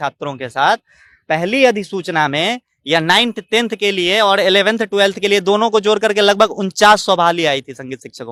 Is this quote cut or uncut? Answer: uncut